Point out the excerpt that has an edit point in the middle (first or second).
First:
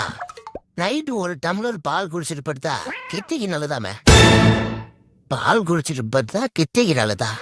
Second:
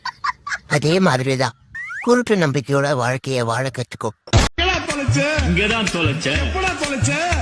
second